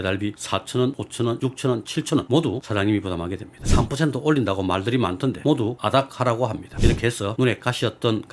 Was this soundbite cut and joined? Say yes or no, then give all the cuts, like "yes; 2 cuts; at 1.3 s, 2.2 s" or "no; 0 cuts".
yes; 3 cuts; at 1.3 s, 3.5 s, 6.7 s